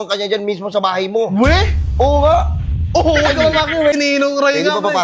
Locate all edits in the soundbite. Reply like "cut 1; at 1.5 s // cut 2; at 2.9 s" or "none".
cut 1; at 4.0 s